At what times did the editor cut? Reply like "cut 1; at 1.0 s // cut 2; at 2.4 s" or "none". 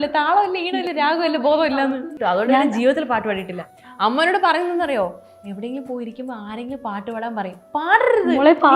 cut 1; at 1.9 s